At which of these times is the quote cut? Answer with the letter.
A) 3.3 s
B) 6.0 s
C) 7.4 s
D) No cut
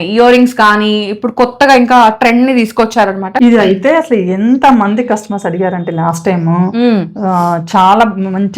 A